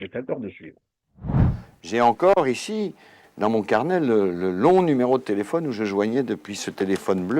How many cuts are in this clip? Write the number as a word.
one